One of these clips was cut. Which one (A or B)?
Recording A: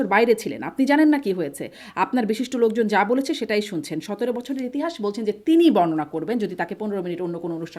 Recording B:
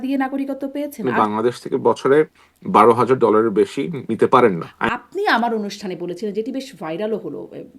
B